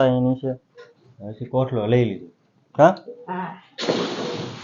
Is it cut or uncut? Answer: uncut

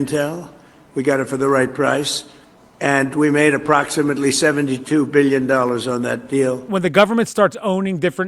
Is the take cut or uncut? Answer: cut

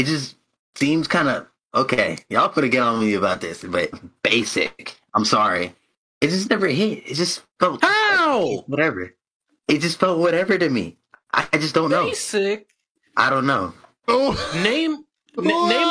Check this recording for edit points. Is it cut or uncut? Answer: cut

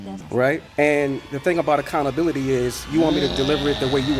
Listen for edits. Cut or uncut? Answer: uncut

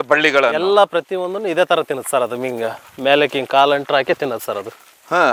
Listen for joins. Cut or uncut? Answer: uncut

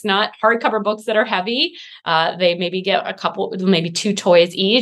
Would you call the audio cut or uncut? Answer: uncut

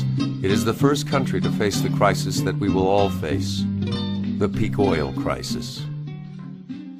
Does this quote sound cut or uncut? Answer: uncut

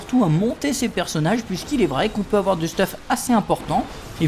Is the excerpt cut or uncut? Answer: uncut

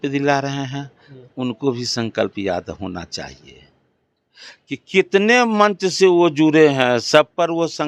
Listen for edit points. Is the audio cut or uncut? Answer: uncut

